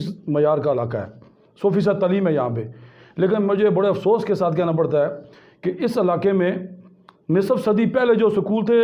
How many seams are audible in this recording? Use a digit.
0